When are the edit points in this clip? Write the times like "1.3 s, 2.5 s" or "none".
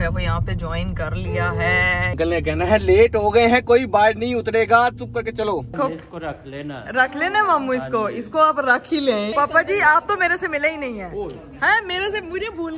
2.1 s, 5.7 s, 9.3 s